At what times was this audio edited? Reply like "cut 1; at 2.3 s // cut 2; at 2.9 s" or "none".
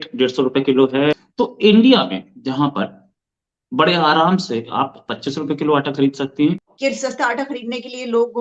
cut 1; at 1.2 s // cut 2; at 6.6 s